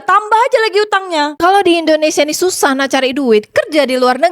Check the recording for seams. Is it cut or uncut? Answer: cut